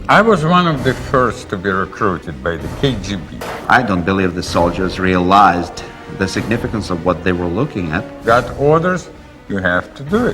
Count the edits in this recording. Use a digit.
2